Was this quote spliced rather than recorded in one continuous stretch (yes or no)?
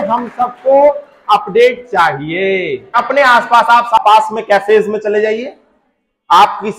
yes